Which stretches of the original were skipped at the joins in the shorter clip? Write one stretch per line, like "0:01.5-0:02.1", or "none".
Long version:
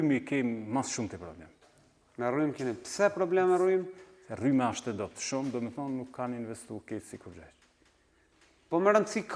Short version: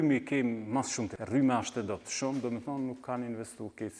0:01.2-0:04.3